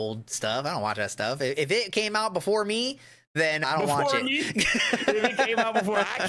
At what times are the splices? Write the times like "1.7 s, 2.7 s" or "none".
3.6 s